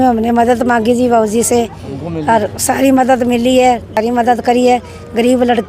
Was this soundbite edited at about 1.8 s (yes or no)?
no